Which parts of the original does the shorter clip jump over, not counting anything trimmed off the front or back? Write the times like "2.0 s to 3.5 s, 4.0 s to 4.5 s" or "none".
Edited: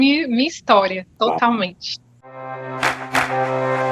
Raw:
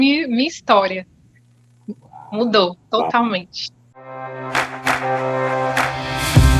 1.1 s to 2.8 s